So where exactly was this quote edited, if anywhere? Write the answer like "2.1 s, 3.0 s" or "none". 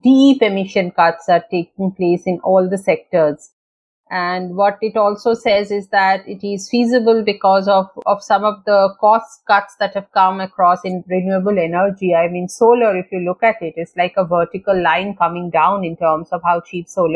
none